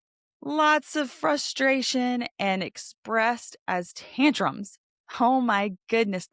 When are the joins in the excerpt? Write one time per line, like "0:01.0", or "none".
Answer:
none